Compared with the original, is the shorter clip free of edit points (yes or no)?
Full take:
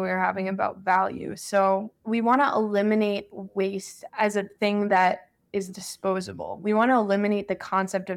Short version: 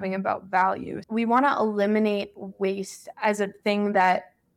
no